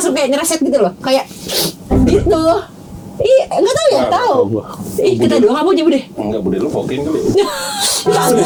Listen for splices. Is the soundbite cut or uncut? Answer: uncut